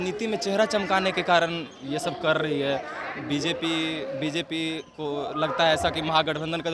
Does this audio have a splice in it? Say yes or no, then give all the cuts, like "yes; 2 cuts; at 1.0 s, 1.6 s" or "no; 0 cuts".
no; 0 cuts